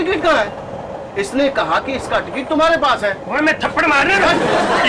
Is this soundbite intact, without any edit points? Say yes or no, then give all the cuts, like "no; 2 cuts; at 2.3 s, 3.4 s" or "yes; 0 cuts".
yes; 0 cuts